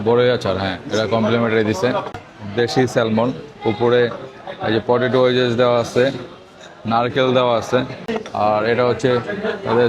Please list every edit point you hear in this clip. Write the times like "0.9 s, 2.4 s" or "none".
2.2 s, 8.1 s